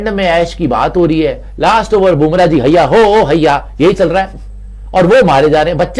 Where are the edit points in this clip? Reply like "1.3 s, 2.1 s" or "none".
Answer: none